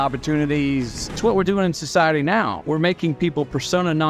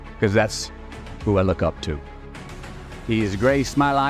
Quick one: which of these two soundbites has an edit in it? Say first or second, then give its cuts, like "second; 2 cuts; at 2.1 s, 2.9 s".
first; 1 cut; at 1.1 s